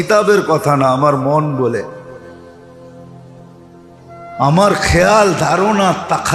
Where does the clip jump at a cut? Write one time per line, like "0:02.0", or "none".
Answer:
0:01.9
0:03.7